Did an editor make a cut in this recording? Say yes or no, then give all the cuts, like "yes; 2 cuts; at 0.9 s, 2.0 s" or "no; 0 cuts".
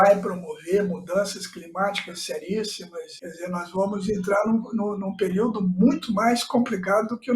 yes; 1 cut; at 3.1 s